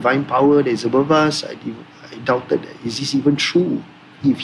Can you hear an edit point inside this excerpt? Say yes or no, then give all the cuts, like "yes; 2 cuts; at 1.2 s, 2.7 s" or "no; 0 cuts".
no; 0 cuts